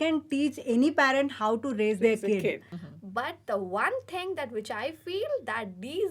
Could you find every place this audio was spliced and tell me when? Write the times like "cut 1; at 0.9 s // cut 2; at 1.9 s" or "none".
cut 1; at 2.7 s